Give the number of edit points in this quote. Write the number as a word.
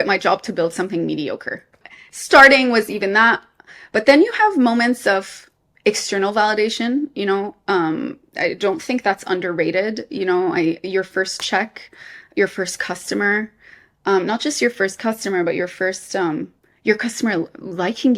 one